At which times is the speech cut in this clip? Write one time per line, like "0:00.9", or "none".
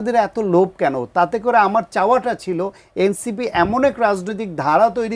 none